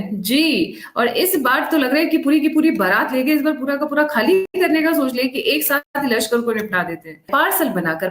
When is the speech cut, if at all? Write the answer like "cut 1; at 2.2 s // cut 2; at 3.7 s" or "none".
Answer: cut 1; at 4.5 s // cut 2; at 5.9 s // cut 3; at 7.3 s